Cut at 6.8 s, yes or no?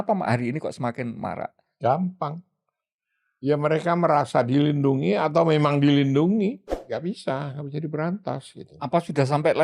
yes